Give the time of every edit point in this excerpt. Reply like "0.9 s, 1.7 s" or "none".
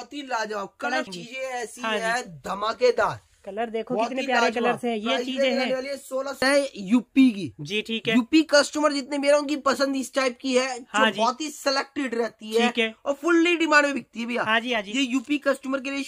1.1 s, 6.4 s